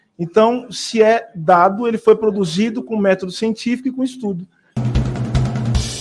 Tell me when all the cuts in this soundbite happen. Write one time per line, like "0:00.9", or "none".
0:04.6